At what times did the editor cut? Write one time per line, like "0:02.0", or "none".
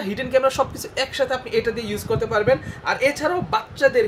none